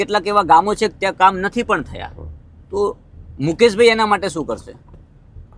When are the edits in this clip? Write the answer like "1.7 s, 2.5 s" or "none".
none